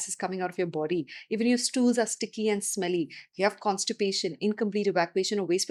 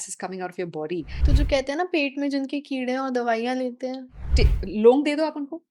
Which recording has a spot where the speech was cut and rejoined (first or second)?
second